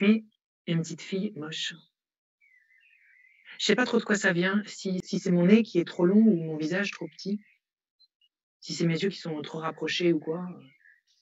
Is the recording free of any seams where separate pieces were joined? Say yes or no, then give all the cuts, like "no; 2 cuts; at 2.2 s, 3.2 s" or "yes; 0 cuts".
no; 1 cut; at 5.0 s